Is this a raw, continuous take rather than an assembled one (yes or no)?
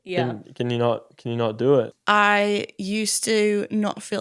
no